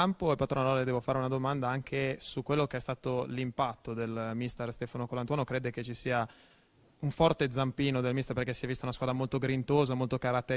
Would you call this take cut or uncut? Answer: cut